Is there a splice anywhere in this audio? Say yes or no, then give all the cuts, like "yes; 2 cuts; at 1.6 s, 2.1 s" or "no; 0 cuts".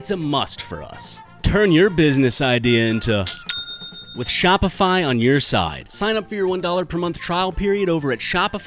no; 0 cuts